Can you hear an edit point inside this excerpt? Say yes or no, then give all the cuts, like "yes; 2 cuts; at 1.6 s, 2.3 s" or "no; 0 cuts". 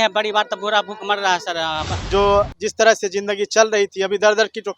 yes; 1 cut; at 2.0 s